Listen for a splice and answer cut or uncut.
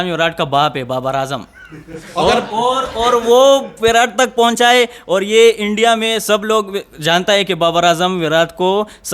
uncut